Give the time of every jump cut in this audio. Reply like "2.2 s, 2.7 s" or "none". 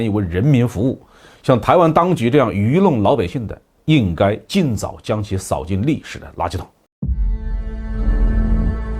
6.9 s